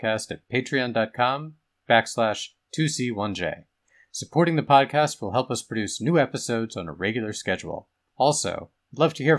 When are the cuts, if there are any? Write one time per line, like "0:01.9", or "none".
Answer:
none